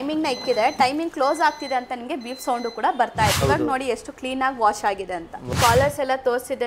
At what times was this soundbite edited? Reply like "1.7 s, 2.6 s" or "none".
3.4 s, 5.6 s